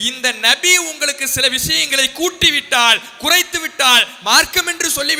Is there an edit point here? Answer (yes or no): no